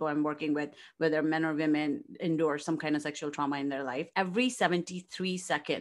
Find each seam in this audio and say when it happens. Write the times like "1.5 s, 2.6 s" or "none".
4.1 s